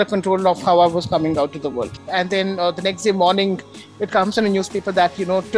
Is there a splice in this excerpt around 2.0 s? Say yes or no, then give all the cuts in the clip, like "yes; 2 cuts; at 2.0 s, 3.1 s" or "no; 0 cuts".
yes; 1 cut; at 2.0 s